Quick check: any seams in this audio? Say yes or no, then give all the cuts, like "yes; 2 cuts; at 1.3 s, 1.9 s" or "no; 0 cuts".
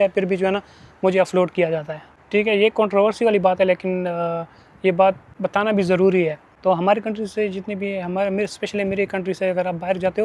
no; 0 cuts